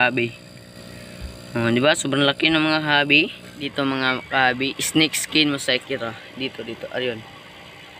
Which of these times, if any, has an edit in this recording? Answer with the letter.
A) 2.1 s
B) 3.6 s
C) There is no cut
B